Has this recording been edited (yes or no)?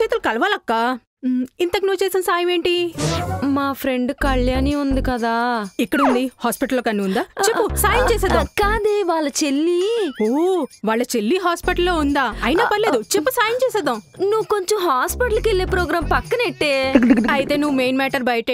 no